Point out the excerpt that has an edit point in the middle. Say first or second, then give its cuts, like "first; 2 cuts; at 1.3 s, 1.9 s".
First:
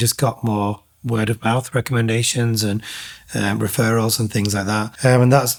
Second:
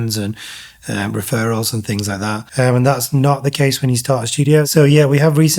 second; 1 cut; at 4.7 s